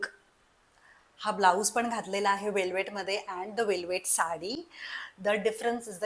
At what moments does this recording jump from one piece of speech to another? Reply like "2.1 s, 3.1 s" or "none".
none